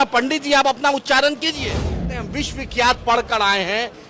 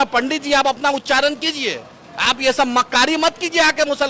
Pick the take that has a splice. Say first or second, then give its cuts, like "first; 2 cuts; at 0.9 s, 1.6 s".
first; 1 cut; at 2.1 s